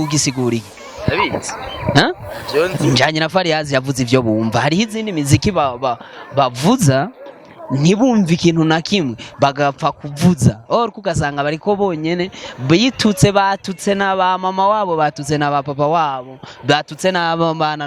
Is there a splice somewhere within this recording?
no; 0 cuts

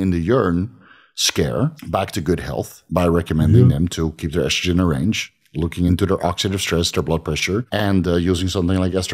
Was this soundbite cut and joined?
yes; 4 cuts; at 1.8 s, 2.8 s, 5.9 s, 7.7 s

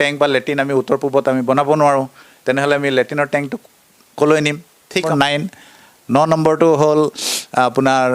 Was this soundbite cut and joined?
yes; 1 cut; at 5.1 s

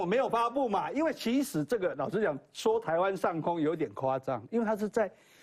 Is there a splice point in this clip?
no; 0 cuts

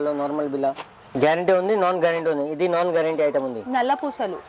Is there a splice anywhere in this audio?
yes; 1 cut; at 1.0 s

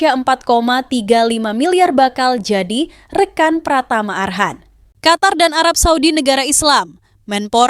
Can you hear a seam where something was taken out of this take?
yes; 1 cut; at 4.9 s

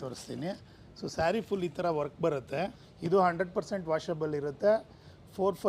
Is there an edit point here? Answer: yes; 1 cut; at 2.9 s

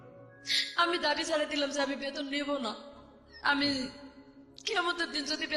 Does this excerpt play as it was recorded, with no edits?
yes; 0 cuts

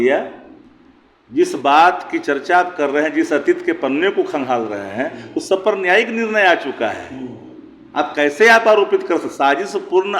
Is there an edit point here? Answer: no; 0 cuts

